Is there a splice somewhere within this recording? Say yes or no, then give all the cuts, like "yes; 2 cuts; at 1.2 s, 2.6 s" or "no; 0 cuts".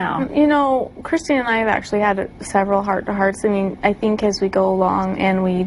no; 0 cuts